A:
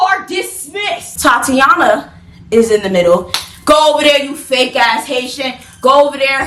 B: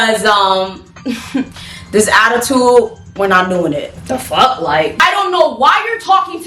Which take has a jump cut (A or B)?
B